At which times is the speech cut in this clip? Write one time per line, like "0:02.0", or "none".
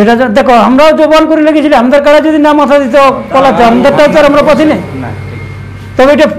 none